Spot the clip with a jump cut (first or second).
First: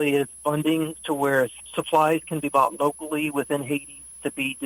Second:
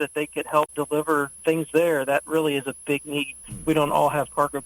second